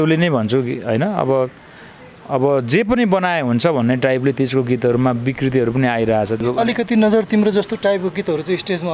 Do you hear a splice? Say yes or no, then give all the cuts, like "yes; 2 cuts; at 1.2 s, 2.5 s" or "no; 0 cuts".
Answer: yes; 1 cut; at 6.4 s